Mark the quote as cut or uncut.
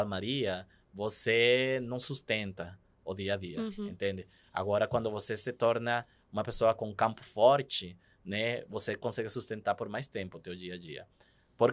uncut